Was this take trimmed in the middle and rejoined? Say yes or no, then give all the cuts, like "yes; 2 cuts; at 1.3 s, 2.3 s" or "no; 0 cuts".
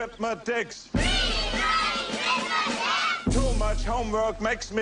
no; 0 cuts